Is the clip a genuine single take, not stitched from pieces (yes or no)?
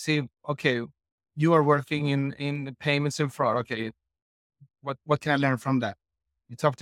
yes